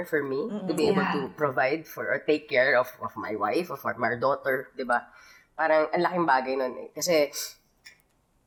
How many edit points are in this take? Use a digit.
0